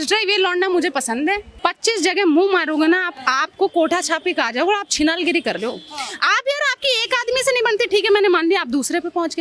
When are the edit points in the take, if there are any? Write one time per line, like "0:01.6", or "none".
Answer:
0:01.5